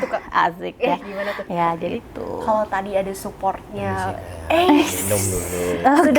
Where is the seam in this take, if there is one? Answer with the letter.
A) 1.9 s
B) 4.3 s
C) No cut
A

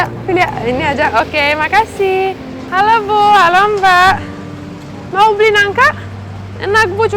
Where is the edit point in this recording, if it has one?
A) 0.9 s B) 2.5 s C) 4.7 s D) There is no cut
B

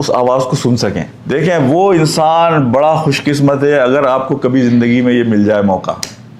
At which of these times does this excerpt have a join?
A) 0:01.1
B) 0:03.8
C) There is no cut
A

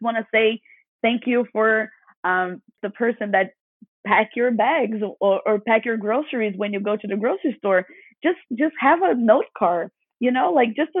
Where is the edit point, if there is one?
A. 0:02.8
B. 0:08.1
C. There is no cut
A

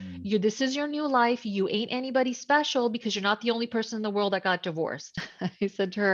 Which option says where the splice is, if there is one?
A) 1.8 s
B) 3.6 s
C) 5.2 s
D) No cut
C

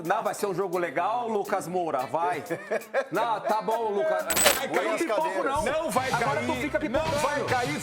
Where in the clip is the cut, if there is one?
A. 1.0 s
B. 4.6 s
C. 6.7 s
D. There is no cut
B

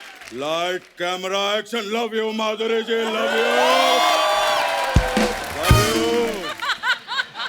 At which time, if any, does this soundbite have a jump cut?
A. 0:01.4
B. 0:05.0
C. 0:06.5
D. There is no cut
C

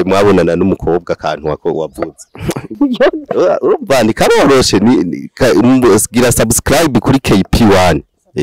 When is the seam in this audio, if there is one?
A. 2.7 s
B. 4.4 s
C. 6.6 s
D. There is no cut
A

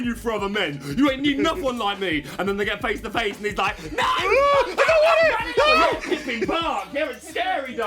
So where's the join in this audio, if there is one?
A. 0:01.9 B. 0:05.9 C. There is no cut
C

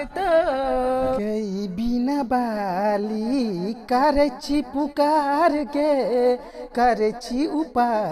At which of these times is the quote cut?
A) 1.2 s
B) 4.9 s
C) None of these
A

